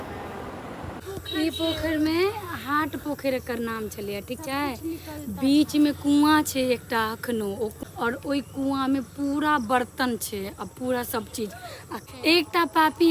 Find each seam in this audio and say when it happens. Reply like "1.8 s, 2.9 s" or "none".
1.1 s, 7.8 s, 12.0 s